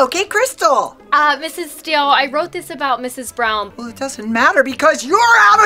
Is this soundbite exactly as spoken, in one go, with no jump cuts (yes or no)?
no